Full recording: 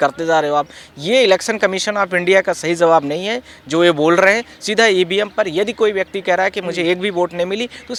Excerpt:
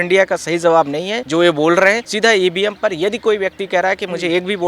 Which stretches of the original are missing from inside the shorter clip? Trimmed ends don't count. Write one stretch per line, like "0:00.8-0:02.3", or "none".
0:03.3-0:03.6
0:04.5-0:04.6